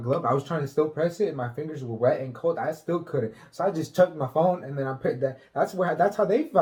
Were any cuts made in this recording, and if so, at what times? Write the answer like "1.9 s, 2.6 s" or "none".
none